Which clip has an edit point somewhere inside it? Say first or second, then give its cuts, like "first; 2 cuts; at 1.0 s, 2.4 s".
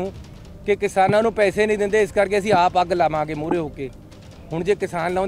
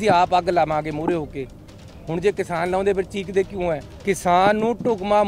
second; 1 cut; at 3.9 s